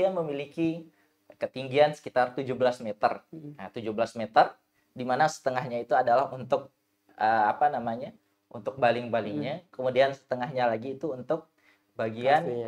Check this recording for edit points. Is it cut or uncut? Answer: uncut